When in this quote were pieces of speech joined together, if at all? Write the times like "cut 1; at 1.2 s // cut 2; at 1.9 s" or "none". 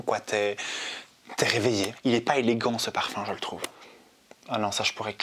cut 1; at 1.9 s // cut 2; at 3.7 s